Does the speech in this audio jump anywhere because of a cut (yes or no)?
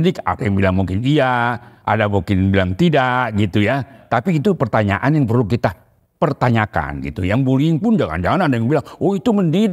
no